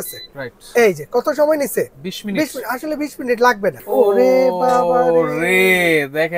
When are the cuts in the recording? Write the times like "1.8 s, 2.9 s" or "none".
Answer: 3.8 s